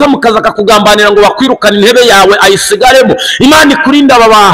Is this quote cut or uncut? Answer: uncut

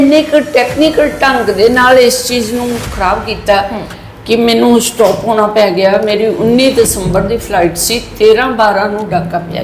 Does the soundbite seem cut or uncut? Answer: uncut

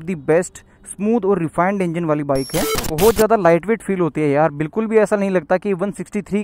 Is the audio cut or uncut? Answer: cut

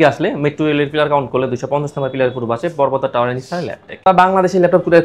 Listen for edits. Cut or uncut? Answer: cut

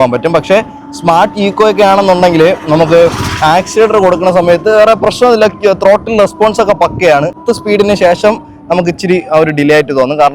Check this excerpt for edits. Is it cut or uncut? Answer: cut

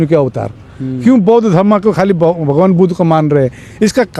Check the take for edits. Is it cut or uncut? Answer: uncut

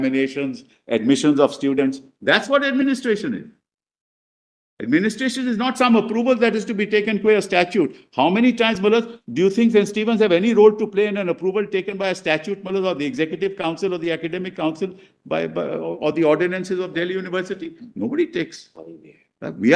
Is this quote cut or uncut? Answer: uncut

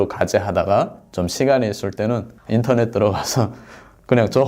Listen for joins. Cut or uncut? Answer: uncut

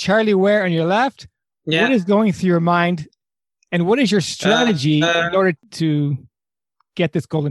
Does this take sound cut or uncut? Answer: cut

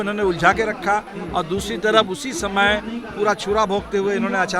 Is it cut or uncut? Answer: uncut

